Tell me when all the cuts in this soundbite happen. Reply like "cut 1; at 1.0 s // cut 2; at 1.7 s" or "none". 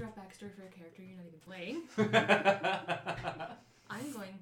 cut 1; at 1.4 s